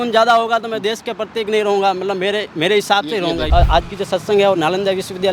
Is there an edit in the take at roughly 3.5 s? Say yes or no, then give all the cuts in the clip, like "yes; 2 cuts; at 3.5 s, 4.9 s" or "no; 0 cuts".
yes; 1 cut; at 3.5 s